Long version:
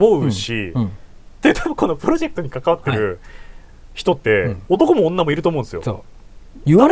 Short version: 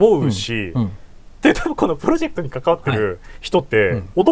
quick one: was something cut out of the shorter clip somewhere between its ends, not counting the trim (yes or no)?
yes